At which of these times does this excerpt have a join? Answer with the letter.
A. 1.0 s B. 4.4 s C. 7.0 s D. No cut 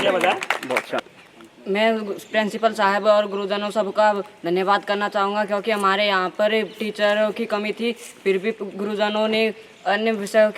A